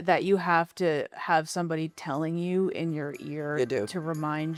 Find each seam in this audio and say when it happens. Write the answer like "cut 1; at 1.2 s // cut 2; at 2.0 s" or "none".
none